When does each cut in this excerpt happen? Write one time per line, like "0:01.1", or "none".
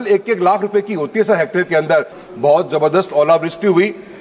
0:02.2